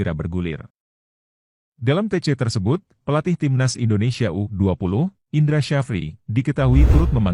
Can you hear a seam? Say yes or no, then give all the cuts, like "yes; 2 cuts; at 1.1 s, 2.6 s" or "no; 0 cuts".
no; 0 cuts